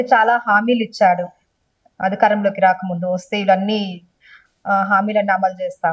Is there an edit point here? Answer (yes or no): no